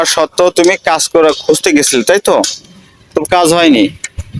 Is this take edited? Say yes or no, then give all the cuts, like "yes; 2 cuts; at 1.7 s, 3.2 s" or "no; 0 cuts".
no; 0 cuts